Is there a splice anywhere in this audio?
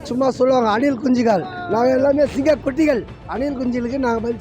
yes; 1 cut; at 3.2 s

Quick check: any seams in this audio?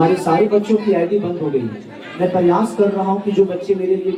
no; 0 cuts

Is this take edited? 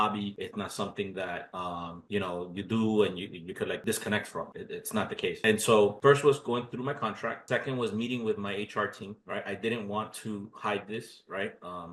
no; 0 cuts

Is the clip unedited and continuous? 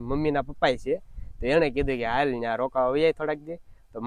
yes; 0 cuts

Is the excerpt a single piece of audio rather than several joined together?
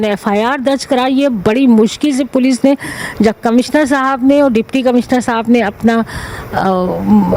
yes; 0 cuts

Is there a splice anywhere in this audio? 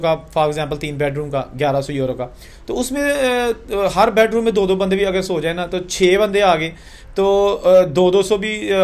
no; 0 cuts

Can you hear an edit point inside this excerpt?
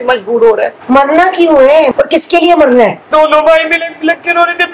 yes; 2 cuts; at 1.9 s, 3.1 s

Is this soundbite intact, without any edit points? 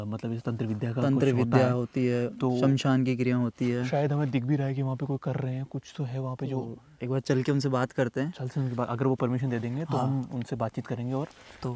yes; 0 cuts

